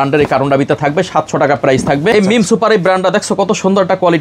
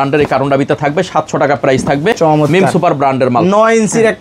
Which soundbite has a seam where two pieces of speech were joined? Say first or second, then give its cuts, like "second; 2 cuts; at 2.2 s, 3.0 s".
first; 1 cut; at 2.1 s